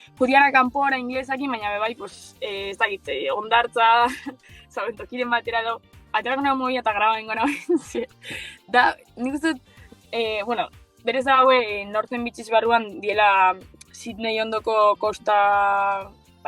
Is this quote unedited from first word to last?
no; 1 cut; at 5.9 s

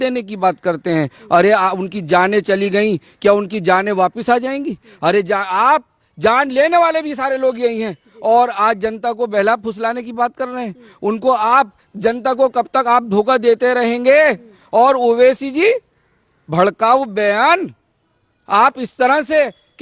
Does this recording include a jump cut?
no; 0 cuts

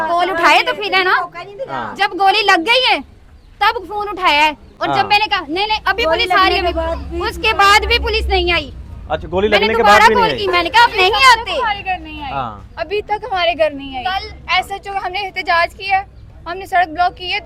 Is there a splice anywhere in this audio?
no; 0 cuts

